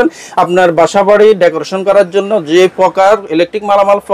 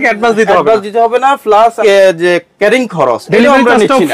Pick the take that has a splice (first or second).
second